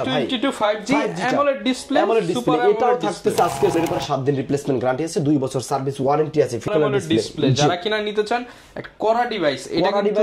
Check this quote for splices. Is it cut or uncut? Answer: cut